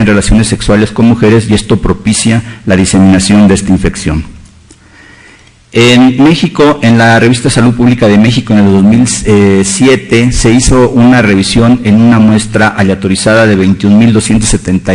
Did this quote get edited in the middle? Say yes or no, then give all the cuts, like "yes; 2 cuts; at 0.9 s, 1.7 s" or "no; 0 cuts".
yes; 1 cut; at 10.5 s